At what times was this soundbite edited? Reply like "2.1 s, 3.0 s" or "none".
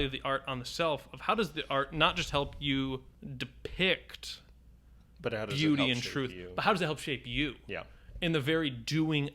3.2 s